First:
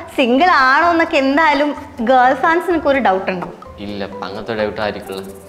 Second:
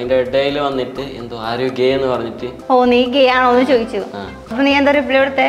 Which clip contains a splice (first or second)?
second